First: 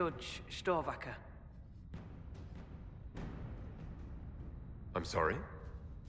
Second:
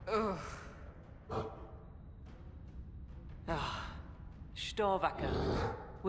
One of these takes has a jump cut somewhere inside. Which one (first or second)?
first